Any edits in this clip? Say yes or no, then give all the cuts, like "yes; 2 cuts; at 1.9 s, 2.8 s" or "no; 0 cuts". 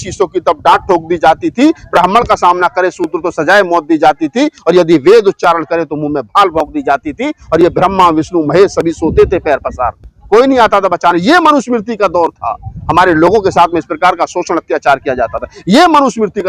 no; 0 cuts